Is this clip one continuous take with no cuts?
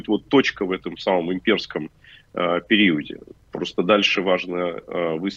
yes; 0 cuts

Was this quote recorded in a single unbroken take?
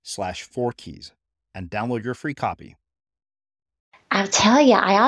no; 1 cut; at 4.0 s

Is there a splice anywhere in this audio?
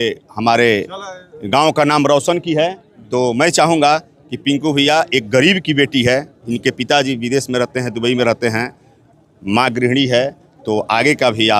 no; 0 cuts

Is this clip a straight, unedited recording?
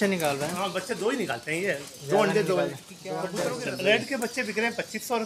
no; 1 cut; at 3.3 s

